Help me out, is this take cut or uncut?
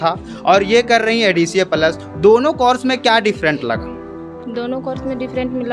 uncut